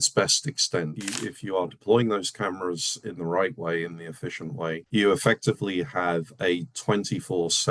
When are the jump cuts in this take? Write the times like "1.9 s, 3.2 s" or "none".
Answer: 1.0 s